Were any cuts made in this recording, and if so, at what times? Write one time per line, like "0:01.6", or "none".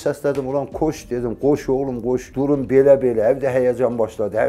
0:02.3